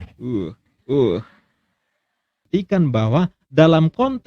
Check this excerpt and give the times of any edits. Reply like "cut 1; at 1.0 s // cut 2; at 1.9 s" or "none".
cut 1; at 2.5 s